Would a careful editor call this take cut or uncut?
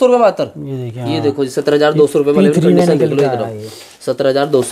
uncut